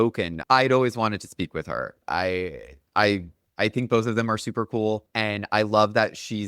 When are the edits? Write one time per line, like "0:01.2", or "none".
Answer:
0:03.4
0:05.1